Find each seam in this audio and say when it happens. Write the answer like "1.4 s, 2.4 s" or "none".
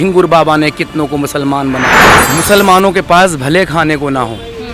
2.2 s